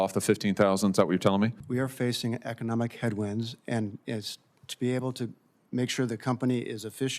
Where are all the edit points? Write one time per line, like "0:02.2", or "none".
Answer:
0:01.6